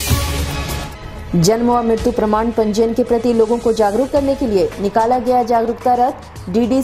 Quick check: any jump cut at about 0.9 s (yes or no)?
yes